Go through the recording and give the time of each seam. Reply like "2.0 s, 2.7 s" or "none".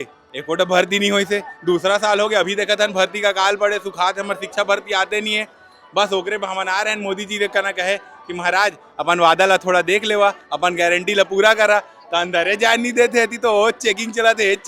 none